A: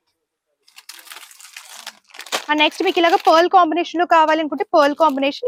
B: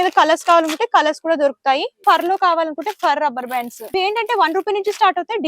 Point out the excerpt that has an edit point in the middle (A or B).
B